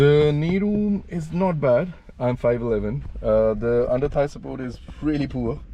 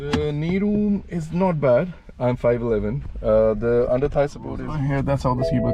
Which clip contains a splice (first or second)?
second